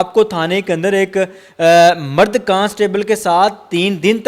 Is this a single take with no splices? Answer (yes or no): yes